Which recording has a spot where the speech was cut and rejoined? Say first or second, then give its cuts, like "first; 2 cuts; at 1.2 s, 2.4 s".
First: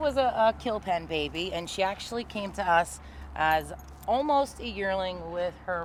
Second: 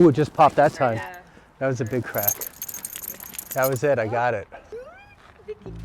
second; 1 cut; at 4.7 s